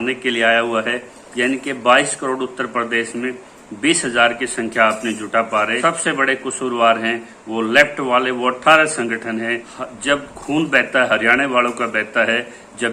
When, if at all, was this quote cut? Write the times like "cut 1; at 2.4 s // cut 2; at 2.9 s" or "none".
cut 1; at 1.2 s // cut 2; at 5.8 s // cut 3; at 9.7 s